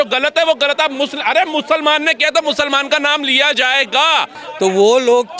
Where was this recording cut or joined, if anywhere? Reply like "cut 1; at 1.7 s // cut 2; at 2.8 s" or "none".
cut 1; at 4.4 s